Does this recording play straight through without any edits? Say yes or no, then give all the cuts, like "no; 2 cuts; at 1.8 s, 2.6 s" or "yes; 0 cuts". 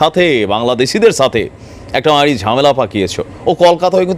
yes; 0 cuts